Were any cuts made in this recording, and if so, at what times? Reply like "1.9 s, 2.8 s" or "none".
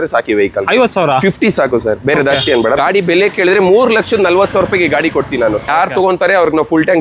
2.8 s, 5.7 s